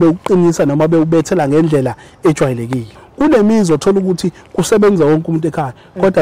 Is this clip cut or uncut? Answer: cut